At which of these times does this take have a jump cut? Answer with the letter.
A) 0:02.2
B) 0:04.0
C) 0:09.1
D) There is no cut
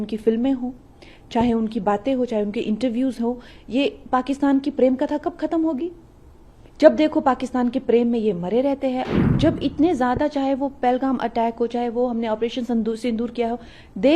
C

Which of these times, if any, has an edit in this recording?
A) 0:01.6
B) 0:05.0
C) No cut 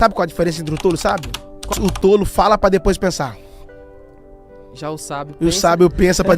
A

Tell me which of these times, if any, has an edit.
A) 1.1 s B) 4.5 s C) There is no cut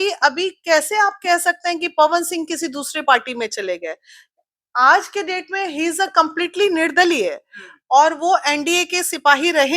C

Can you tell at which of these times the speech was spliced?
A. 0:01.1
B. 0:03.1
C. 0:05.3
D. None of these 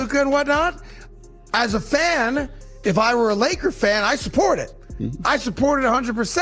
D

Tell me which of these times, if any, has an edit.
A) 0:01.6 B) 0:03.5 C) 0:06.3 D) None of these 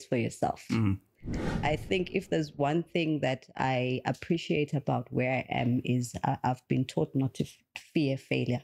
A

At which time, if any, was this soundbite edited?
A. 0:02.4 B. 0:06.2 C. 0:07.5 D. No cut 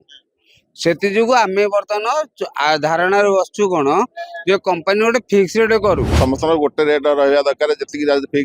B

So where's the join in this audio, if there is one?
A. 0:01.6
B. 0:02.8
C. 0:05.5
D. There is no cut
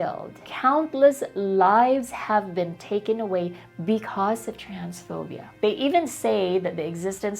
C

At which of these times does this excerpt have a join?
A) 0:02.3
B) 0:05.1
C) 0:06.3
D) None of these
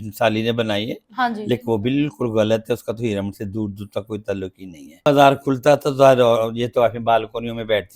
B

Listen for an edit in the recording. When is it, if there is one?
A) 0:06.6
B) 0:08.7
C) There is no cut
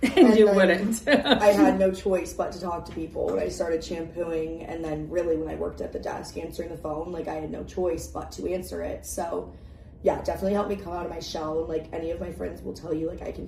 C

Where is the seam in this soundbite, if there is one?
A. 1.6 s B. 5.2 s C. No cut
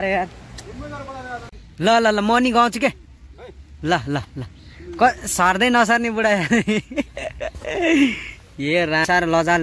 A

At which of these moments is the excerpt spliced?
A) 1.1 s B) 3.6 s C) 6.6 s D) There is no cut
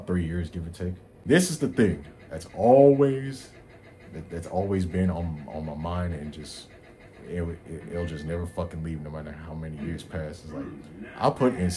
A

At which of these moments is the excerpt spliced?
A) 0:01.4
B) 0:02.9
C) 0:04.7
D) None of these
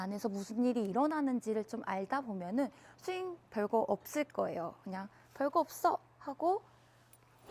D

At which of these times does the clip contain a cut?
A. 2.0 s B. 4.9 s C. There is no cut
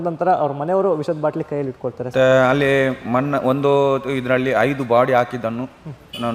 A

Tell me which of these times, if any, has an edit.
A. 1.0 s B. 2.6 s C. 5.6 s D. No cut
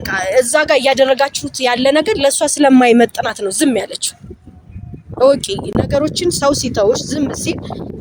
D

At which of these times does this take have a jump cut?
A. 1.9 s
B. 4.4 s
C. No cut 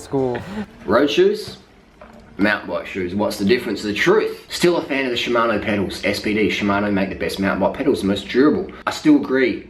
B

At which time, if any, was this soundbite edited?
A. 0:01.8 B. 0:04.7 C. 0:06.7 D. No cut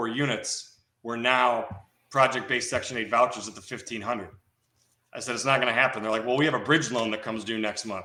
D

